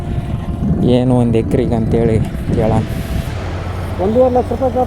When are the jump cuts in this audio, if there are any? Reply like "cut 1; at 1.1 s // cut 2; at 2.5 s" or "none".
cut 1; at 3.3 s